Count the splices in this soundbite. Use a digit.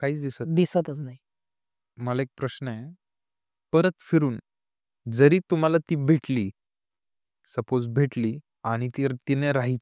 1